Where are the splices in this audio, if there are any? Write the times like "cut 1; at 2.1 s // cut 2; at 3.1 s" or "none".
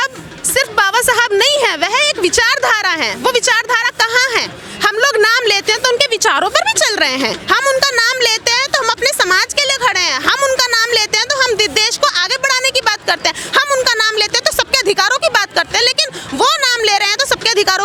none